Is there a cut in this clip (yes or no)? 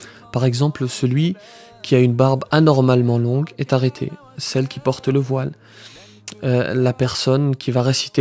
no